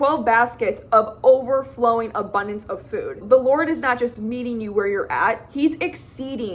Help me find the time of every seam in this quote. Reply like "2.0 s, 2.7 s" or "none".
3.2 s